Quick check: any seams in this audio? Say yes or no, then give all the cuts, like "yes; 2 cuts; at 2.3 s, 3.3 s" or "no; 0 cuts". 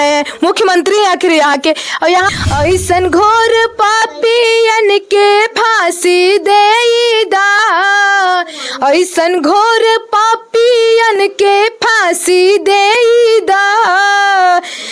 yes; 1 cut; at 2.3 s